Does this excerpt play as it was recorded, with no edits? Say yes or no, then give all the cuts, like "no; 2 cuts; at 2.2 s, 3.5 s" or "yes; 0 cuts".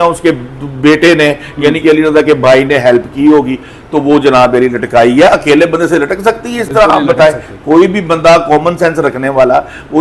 yes; 0 cuts